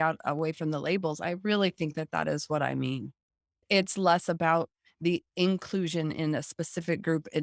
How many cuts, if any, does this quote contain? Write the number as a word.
zero